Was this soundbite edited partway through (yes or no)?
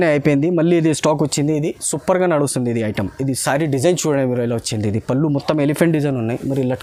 no